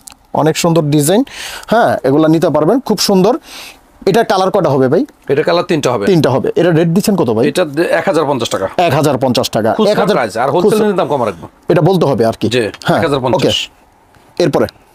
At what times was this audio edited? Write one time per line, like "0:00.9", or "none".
none